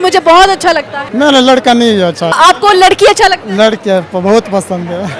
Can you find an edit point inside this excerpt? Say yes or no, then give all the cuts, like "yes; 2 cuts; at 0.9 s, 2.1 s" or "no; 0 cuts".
yes; 2 cuts; at 1.0 s, 2.3 s